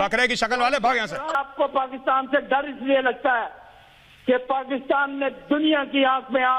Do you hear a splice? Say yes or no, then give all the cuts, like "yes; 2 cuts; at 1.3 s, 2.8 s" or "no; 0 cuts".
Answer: no; 0 cuts